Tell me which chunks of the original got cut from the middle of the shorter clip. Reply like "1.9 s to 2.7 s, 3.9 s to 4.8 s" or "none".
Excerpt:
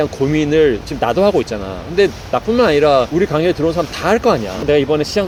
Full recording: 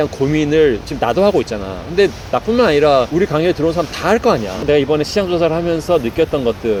none